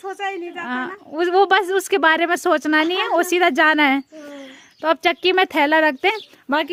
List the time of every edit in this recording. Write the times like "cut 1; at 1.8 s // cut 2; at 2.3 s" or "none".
none